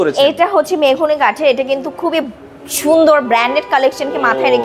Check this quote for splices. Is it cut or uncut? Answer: uncut